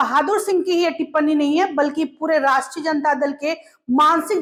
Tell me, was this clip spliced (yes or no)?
no